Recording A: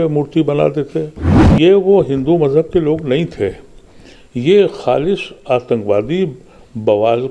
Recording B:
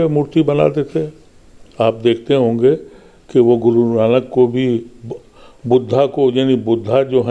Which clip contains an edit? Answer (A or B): A